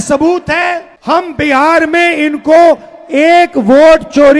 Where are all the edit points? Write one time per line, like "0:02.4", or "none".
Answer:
0:00.9

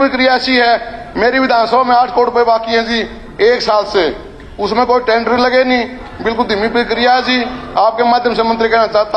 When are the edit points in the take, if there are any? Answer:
none

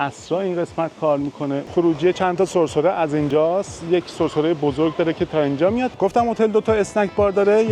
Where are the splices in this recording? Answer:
0:01.6
0:05.9

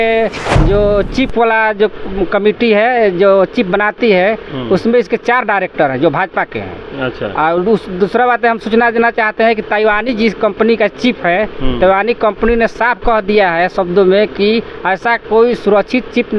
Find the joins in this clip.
none

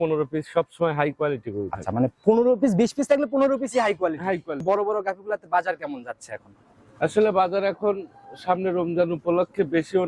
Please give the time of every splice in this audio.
0:04.6

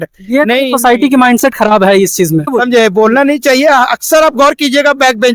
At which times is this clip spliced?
0:02.5

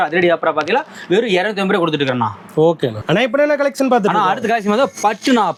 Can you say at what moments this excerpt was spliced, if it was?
none

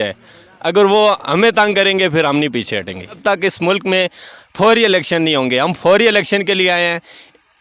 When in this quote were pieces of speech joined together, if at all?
0:03.2

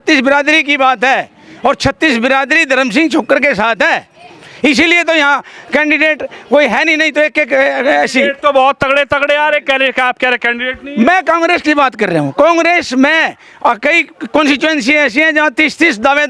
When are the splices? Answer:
none

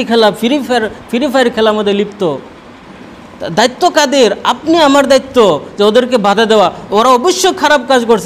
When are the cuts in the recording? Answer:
none

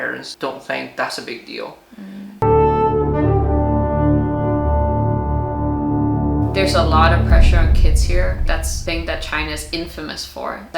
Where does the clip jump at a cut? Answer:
none

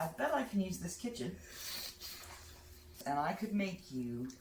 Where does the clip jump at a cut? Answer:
0:03.0

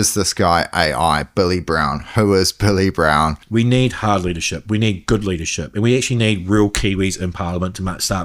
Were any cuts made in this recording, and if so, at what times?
0:03.4

